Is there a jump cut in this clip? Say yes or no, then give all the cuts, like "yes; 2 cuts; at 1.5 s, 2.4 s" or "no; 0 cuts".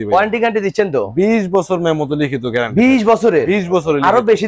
no; 0 cuts